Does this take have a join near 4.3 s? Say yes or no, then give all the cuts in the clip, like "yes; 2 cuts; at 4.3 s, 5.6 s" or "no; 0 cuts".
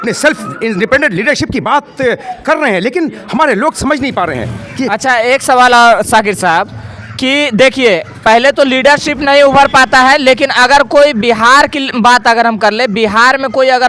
no; 0 cuts